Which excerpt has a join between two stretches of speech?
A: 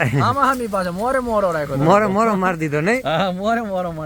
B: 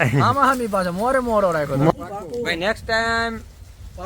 B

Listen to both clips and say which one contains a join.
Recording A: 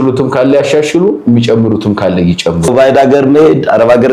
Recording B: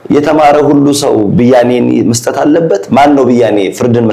A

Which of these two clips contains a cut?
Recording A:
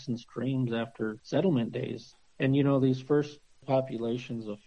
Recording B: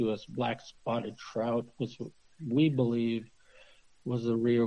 A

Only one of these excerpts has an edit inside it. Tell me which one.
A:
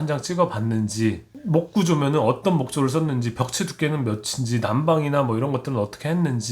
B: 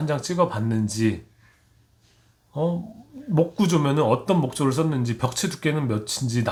A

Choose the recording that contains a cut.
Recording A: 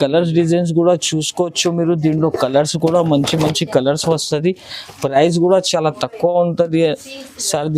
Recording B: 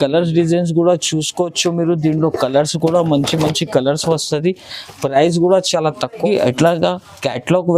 B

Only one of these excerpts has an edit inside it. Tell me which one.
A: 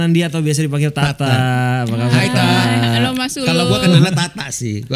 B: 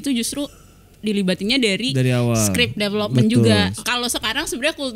B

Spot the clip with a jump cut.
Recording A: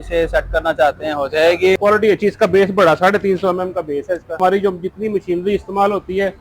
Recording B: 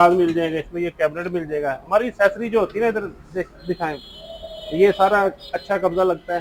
A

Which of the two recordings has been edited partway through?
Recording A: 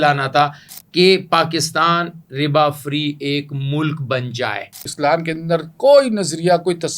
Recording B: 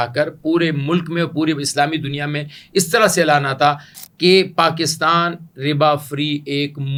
A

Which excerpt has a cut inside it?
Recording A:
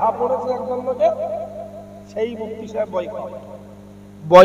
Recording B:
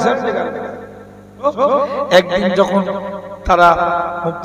B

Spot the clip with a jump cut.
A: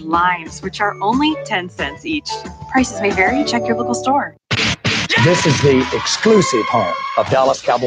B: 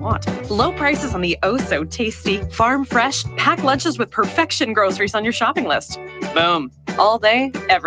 A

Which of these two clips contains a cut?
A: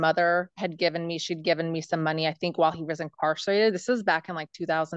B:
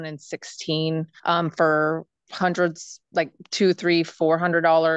B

